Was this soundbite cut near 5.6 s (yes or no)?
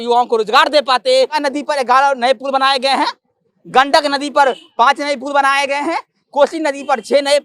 no